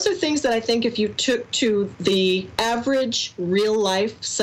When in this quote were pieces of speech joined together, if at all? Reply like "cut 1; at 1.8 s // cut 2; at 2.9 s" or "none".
cut 1; at 2.2 s

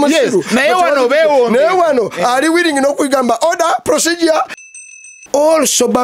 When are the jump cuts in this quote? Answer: cut 1; at 4.6 s

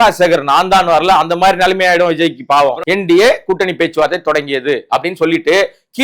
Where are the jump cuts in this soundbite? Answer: cut 1; at 2.8 s

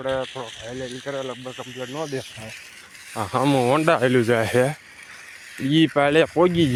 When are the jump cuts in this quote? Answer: none

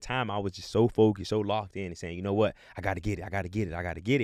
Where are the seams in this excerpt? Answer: none

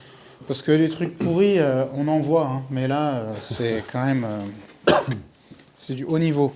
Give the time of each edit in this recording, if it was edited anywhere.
none

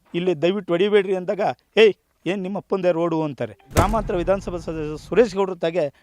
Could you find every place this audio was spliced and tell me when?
cut 1; at 3.7 s

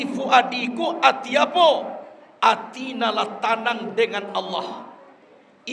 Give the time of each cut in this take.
none

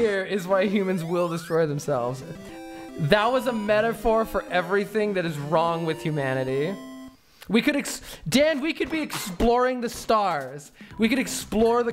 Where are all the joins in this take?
none

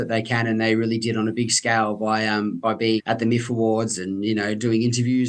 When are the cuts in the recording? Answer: cut 1; at 3.0 s

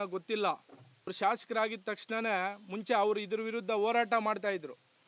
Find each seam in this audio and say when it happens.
cut 1; at 1.1 s

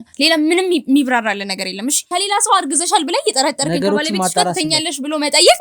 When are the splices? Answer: cut 1; at 2.0 s

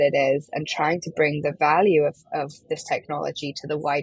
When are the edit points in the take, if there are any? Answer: none

